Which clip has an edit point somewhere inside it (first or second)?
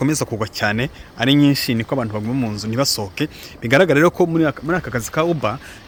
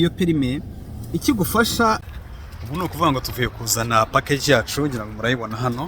second